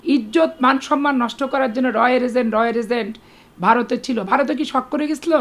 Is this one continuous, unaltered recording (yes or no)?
yes